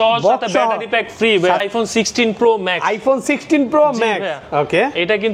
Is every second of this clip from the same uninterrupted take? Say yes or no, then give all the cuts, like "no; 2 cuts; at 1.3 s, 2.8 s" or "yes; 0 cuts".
no; 1 cut; at 1.6 s